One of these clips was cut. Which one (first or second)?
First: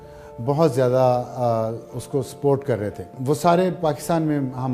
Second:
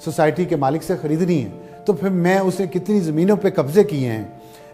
first